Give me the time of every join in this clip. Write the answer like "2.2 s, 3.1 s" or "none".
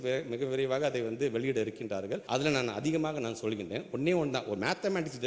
2.2 s